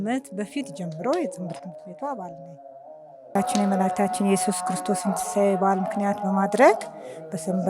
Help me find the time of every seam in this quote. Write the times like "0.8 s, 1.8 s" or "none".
3.3 s